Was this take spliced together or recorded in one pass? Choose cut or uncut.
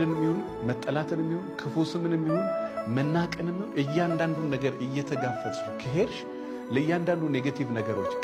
uncut